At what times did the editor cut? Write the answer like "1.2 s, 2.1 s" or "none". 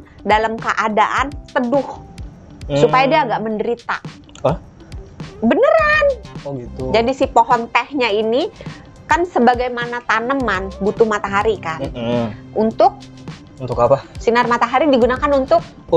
none